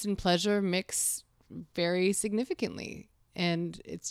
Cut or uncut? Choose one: uncut